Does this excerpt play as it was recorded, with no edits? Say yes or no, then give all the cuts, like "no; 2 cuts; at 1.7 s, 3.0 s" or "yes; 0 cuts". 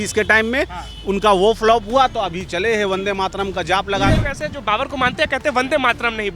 no; 1 cut; at 4.1 s